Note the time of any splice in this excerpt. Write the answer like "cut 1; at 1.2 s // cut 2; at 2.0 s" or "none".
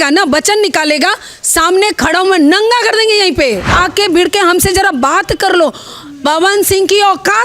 cut 1; at 3.7 s